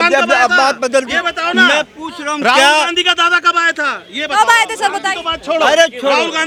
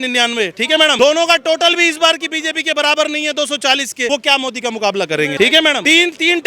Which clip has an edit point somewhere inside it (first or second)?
second